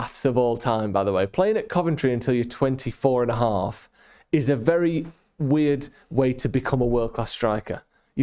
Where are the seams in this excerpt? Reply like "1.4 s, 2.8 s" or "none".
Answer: none